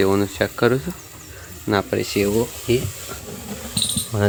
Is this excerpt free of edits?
yes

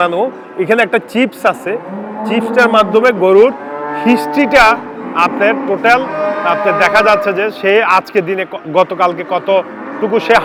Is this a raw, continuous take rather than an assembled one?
yes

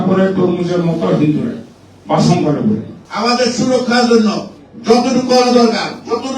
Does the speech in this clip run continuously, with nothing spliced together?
no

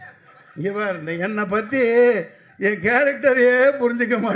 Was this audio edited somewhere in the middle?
no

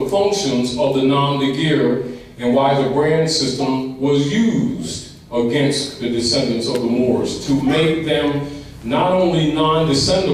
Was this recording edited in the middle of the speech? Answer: yes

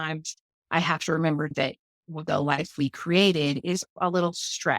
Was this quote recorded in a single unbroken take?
no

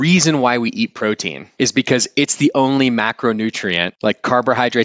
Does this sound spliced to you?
yes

